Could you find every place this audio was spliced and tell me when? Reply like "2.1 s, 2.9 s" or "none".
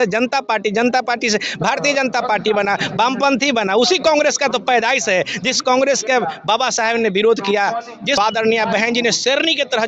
8.2 s